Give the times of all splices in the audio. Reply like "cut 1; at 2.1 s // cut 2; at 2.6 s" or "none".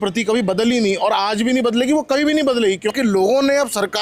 cut 1; at 2.9 s